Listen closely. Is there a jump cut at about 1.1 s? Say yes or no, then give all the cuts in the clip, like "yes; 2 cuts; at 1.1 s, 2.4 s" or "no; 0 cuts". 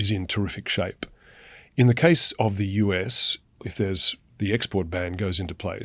no; 1 cut; at 3.7 s